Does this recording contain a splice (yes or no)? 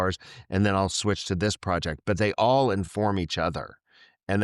no